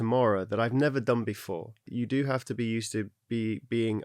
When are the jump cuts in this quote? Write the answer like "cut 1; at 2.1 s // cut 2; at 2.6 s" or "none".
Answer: cut 1; at 1.9 s